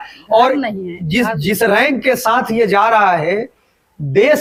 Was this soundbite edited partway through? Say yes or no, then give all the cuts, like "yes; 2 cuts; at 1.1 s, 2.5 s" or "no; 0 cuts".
no; 0 cuts